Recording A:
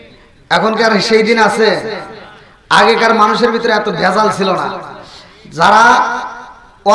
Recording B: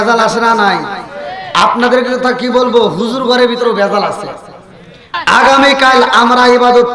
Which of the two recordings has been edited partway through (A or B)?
B